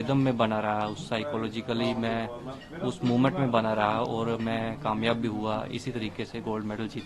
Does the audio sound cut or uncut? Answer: uncut